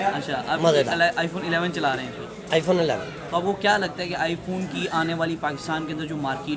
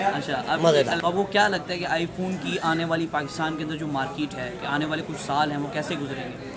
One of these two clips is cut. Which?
second; 1 cut; at 1.0 s

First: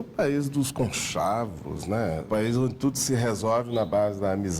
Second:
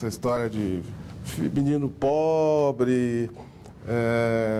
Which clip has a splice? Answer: first; 1 cut; at 2.2 s

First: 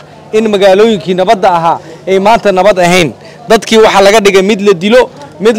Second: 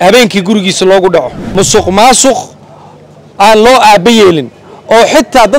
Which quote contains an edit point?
second; 1 cut; at 1.4 s

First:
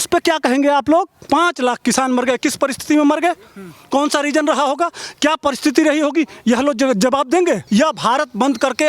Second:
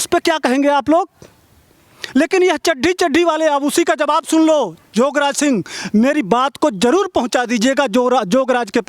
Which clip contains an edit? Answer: first; 2 cuts; at 1.2 s, 7.6 s

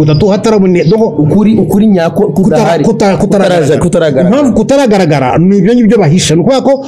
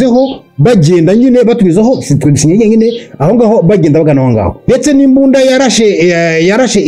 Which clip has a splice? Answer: second; 1 cut; at 4.6 s

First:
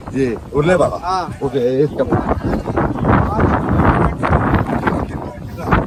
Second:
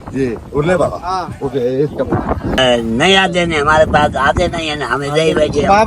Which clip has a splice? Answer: second; 1 cut; at 2.6 s

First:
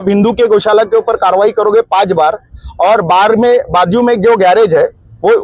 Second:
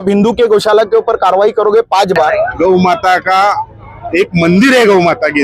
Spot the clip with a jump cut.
second; 1 cut; at 2.3 s

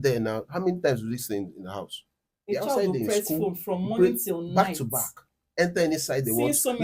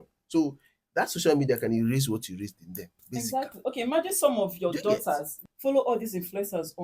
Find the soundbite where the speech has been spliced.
second; 1 cut; at 5.3 s

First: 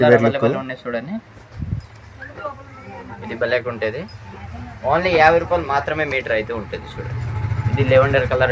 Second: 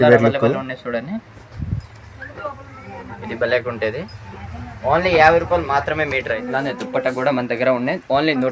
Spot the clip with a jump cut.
second; 1 cut; at 6.4 s

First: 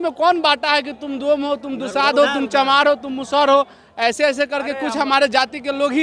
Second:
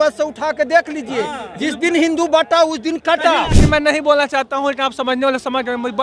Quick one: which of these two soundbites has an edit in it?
second; 1 cut; at 3.6 s

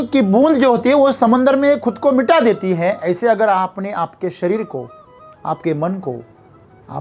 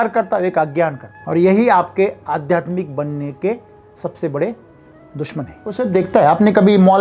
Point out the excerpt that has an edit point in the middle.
second; 2 cuts; at 1.1 s, 5.8 s

